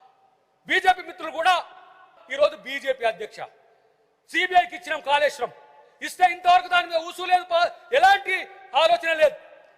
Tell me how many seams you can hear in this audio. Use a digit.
1